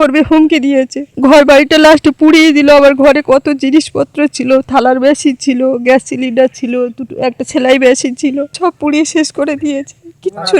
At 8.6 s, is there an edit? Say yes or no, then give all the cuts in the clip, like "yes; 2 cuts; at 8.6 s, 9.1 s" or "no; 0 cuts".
yes; 2 cuts; at 1.0 s, 8.6 s